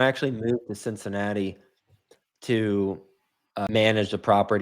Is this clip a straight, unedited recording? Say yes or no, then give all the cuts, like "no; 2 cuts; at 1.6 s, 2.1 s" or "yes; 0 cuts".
no; 1 cut; at 3.7 s